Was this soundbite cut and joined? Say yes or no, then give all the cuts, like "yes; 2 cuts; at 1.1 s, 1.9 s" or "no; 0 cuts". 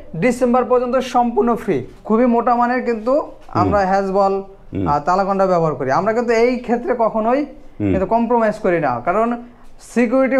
yes; 1 cut; at 1.9 s